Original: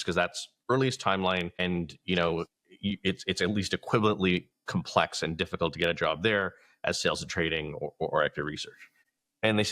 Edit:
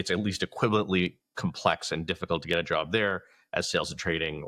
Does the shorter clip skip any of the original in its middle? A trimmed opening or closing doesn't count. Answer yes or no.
no